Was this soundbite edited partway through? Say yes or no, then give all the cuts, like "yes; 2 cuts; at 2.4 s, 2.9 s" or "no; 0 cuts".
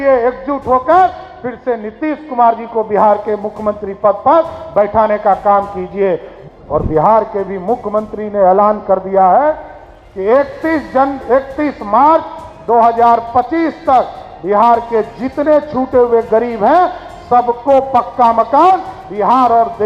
yes; 1 cut; at 6.3 s